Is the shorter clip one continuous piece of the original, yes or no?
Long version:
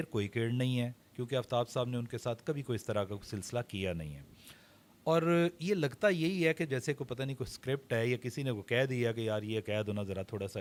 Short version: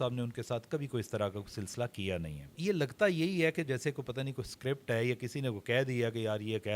no